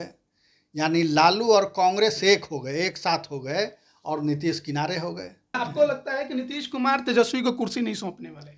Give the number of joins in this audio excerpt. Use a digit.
1